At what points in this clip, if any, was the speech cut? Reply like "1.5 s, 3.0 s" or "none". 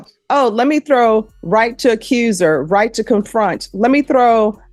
none